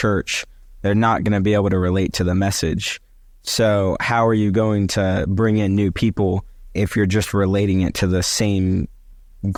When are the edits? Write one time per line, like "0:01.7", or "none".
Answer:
none

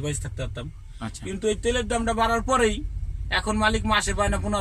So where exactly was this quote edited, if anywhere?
none

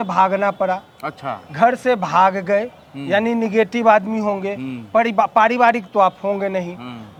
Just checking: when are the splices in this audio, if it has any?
none

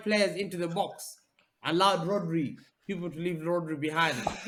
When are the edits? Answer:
none

